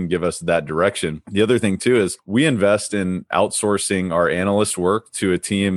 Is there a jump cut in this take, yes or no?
yes